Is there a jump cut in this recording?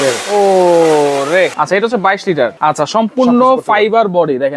yes; 2 cuts; at 1.5 s, 2.5 s

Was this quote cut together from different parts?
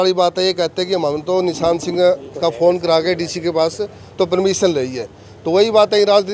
no; 0 cuts

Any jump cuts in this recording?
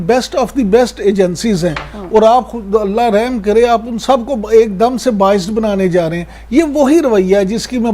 no; 0 cuts

